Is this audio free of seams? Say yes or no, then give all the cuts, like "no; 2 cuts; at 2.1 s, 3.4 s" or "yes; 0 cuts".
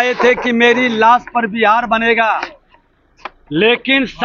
yes; 0 cuts